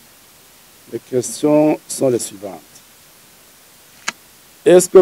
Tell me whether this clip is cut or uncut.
uncut